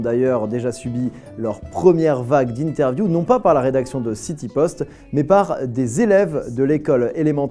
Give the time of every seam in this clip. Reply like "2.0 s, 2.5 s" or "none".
3.0 s